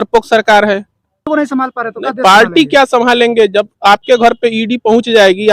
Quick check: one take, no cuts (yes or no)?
no